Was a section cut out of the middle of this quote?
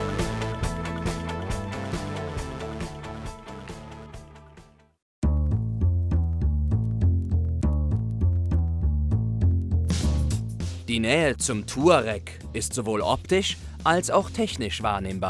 no; 0 cuts

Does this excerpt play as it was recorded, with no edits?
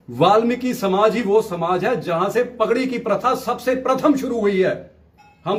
yes; 0 cuts

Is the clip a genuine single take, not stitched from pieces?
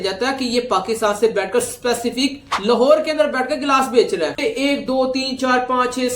no; 1 cut; at 4.4 s

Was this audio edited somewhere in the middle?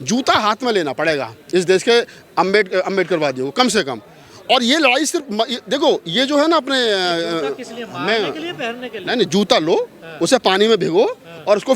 no; 0 cuts

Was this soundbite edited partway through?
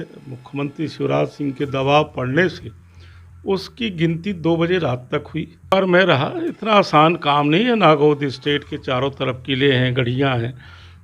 yes; 1 cut; at 5.7 s

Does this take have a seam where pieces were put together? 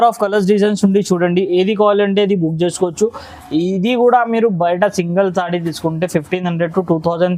no; 0 cuts

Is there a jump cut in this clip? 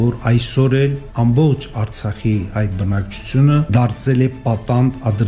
yes; 2 cuts; at 1.0 s, 3.7 s

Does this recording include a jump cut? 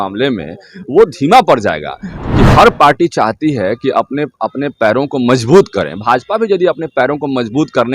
yes; 1 cut; at 2.1 s

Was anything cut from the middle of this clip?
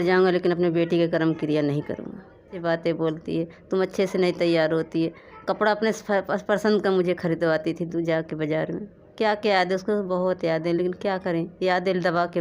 yes; 1 cut; at 2.5 s

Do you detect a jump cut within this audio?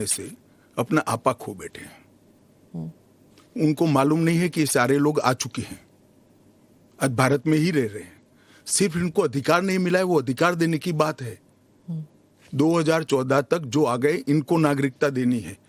no; 0 cuts

